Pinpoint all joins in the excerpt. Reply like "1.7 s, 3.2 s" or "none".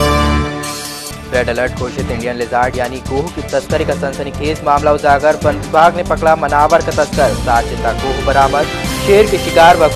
0.9 s